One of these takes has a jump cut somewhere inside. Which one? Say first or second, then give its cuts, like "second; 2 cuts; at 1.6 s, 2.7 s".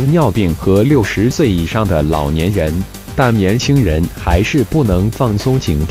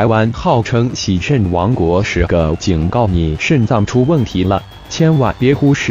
second; 1 cut; at 1.7 s